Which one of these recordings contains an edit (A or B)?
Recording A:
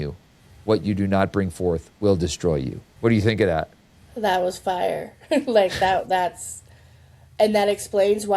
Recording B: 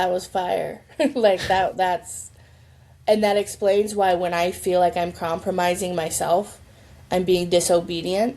A